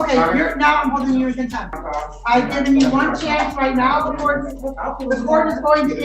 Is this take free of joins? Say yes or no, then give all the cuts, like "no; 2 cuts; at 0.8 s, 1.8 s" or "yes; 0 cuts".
no; 1 cut; at 1.8 s